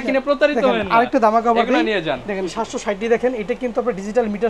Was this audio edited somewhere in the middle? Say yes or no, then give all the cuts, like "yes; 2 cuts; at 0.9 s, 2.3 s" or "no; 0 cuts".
no; 0 cuts